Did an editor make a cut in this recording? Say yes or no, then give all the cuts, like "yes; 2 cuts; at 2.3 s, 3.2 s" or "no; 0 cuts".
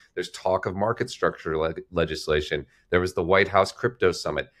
no; 0 cuts